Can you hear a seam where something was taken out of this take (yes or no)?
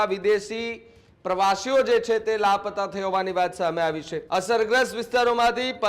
yes